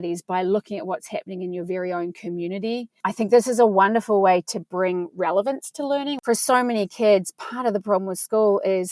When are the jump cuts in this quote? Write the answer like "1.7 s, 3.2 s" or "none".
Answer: 6.2 s